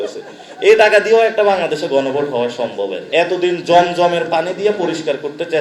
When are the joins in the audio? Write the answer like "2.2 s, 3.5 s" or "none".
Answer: 3.0 s